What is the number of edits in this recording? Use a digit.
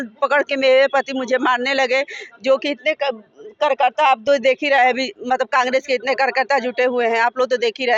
0